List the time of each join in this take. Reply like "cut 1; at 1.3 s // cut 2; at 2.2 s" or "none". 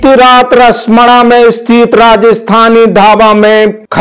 none